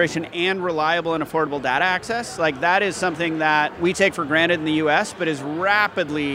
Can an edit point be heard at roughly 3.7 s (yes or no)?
yes